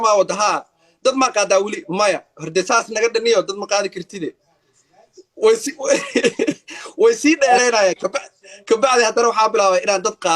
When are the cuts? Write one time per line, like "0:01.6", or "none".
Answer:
none